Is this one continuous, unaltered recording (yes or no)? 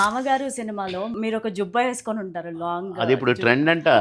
no